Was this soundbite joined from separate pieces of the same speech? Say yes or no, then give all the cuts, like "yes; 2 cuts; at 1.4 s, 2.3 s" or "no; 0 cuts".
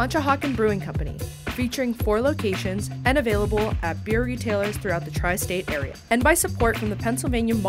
yes; 1 cut; at 6.0 s